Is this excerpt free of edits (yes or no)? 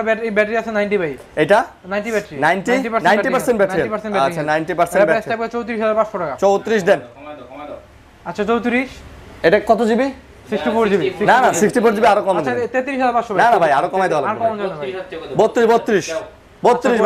yes